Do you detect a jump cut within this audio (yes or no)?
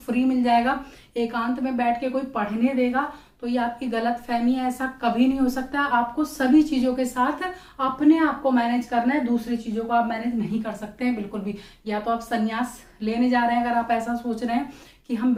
no